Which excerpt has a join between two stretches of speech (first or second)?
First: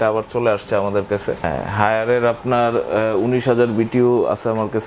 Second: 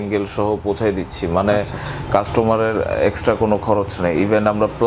first